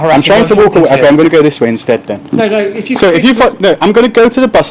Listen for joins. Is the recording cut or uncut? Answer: uncut